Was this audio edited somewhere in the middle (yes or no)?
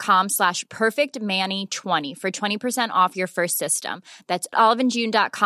yes